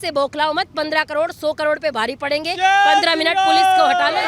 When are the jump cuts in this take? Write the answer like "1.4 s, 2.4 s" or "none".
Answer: none